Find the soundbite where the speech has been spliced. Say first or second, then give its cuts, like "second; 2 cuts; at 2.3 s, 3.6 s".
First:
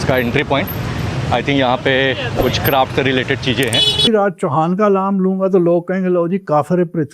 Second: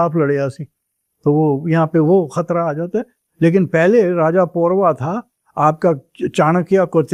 first; 1 cut; at 4.0 s